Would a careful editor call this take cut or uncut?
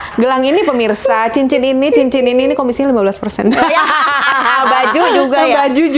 uncut